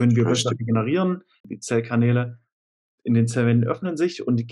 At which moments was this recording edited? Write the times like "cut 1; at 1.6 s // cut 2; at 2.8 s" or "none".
cut 1; at 1.5 s